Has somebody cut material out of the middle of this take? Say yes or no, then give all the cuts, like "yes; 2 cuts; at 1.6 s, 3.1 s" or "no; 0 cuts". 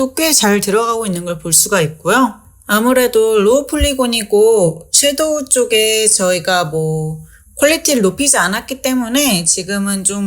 yes; 1 cut; at 2.5 s